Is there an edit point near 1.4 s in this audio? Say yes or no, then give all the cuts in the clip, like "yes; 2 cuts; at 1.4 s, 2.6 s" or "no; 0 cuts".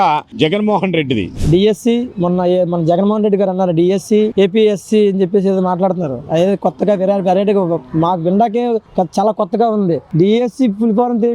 yes; 1 cut; at 1.4 s